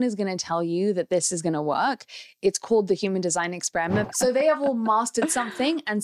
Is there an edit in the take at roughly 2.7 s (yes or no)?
no